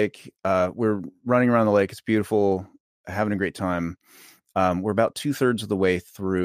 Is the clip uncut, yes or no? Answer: yes